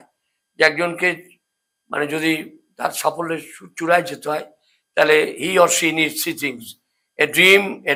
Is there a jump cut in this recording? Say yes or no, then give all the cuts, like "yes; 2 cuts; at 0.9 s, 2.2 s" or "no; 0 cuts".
no; 0 cuts